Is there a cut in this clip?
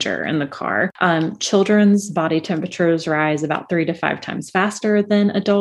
yes; 1 cut; at 0.9 s

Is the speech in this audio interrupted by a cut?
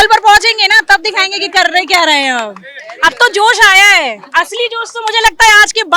no; 0 cuts

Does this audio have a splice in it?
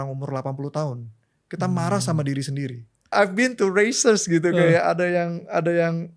yes; 1 cut; at 3.1 s

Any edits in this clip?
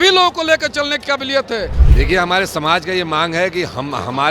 yes; 1 cut; at 1.8 s

